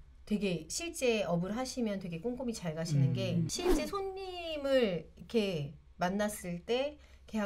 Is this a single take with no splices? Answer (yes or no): no